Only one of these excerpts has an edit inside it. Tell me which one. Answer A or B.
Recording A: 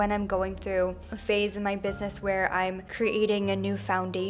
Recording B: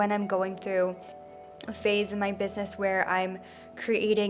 A